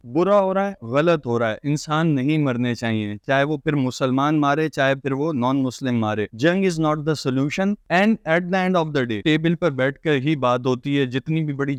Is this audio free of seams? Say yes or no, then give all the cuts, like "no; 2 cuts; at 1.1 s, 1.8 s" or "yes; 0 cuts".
yes; 0 cuts